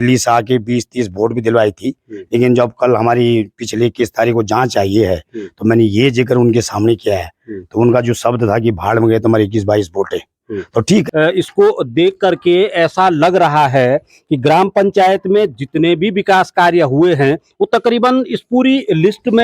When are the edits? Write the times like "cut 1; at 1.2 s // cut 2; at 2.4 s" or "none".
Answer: cut 1; at 11.1 s